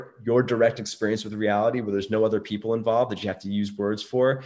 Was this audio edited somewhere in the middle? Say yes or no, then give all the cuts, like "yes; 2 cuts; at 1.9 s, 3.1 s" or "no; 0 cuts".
no; 0 cuts